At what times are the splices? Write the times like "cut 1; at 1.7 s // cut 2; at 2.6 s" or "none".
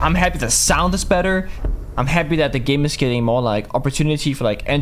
none